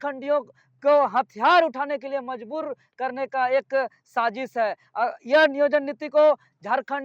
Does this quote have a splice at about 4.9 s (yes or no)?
no